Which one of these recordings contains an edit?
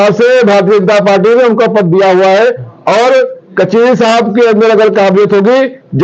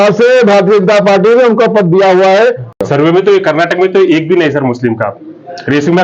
second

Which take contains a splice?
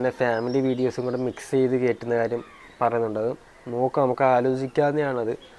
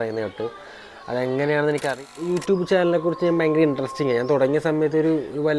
second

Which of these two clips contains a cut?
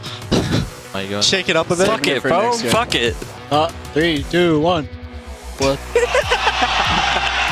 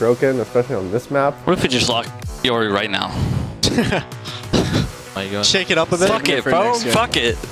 second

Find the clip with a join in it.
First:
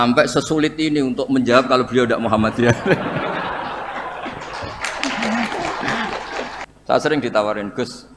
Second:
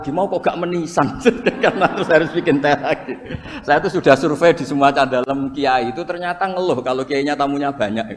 first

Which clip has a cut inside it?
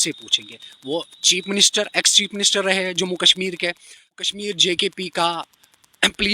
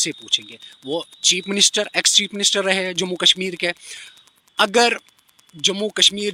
first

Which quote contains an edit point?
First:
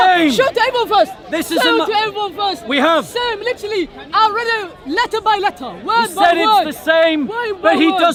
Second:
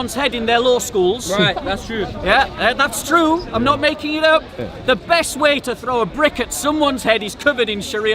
second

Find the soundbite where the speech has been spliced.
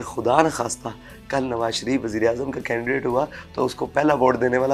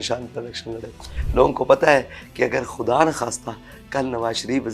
second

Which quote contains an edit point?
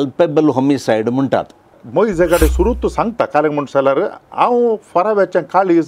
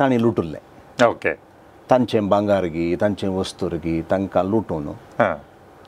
first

